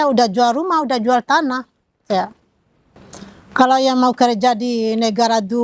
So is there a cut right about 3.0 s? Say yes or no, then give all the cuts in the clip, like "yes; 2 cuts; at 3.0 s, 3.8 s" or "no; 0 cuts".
yes; 1 cut; at 3.0 s